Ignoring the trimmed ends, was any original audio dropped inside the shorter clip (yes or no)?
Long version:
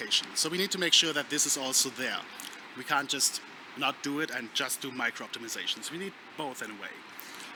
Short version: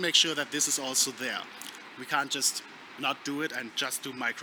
no